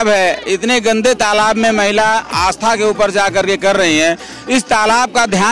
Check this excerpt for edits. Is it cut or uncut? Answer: uncut